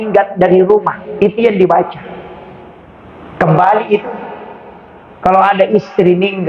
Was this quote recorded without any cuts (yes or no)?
yes